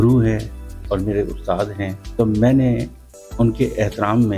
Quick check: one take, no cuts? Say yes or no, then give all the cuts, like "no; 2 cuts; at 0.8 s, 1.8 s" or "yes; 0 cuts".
no; 1 cut; at 2.0 s